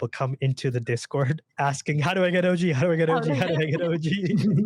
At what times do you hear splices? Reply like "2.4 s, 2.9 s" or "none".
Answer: 1.5 s